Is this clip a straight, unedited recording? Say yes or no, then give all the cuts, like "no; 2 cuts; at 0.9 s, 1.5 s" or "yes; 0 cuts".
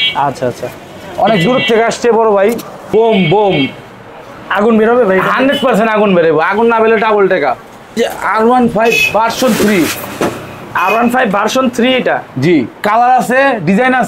no; 2 cuts; at 2.7 s, 8.0 s